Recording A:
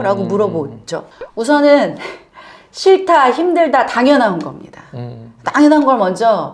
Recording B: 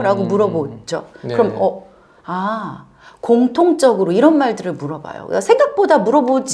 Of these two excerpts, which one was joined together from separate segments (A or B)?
A